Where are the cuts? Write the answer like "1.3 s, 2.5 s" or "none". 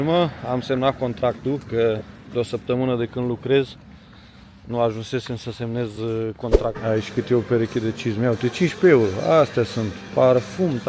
6.8 s